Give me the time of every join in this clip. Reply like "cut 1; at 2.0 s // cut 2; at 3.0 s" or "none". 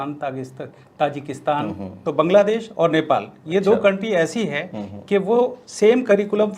cut 1; at 2.0 s